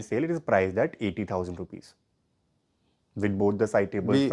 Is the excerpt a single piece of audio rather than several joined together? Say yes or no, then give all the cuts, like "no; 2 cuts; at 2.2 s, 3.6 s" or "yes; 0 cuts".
yes; 0 cuts